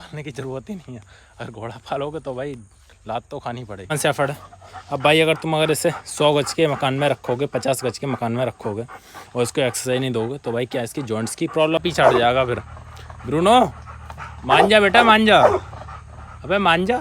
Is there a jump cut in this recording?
yes; 2 cuts; at 3.9 s, 11.8 s

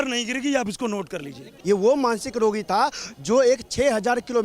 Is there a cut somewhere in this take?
yes; 1 cut; at 1.5 s

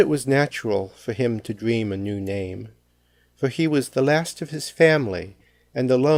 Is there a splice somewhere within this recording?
no; 0 cuts

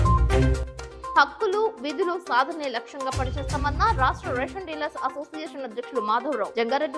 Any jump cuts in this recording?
no; 0 cuts

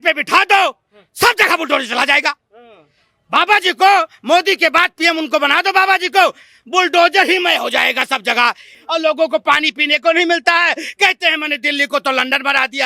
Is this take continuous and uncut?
no; 1 cut; at 8.7 s

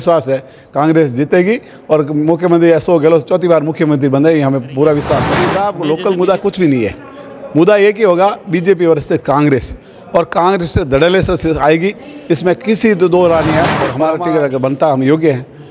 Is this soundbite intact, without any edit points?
no; 2 cuts; at 5.6 s, 13.9 s

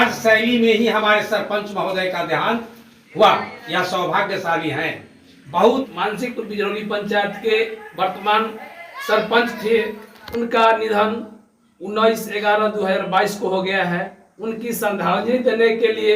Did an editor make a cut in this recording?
yes; 1 cut; at 5.9 s

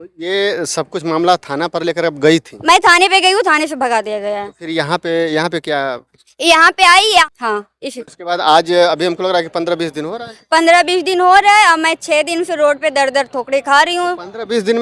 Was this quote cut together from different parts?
yes; 1 cut; at 7.3 s

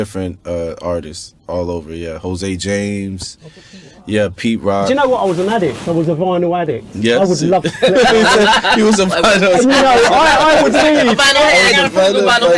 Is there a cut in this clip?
yes; 1 cut; at 4.9 s

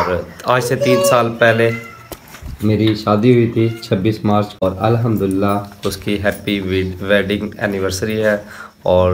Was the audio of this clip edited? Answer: yes; 1 cut; at 4.6 s

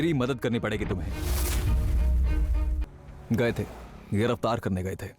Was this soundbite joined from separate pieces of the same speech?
yes; 1 cut; at 2.8 s

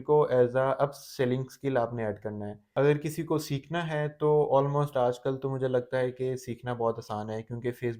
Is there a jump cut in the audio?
no; 0 cuts

